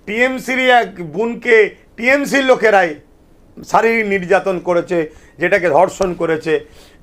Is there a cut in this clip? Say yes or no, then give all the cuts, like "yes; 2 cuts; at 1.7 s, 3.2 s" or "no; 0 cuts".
no; 0 cuts